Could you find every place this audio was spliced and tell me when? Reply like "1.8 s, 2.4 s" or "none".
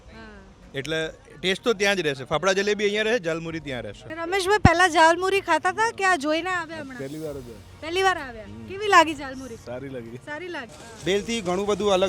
4.1 s, 10.8 s